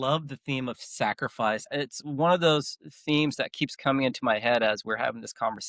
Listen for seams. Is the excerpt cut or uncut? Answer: cut